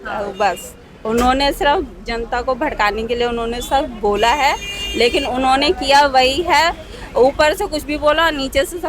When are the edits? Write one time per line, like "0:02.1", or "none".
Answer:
none